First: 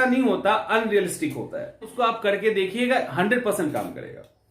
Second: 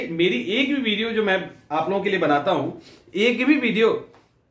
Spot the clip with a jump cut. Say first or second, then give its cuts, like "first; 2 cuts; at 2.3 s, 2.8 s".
first; 1 cut; at 1.8 s